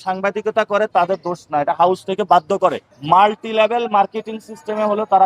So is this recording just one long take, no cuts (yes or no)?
no